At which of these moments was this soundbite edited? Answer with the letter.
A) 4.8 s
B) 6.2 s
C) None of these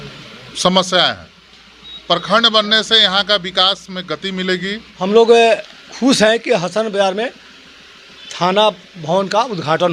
A